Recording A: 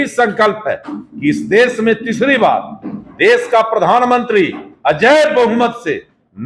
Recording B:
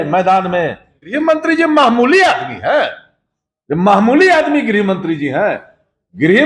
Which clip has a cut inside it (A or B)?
B